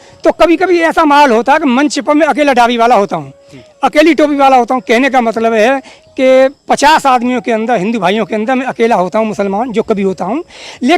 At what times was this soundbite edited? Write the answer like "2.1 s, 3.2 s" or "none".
none